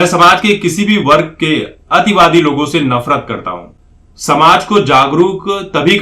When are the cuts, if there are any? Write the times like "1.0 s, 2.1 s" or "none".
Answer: 3.6 s